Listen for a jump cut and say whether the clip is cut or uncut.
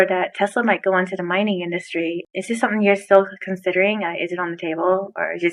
uncut